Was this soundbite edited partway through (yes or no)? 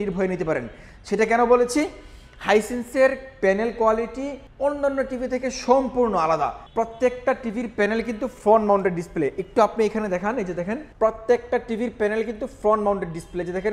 yes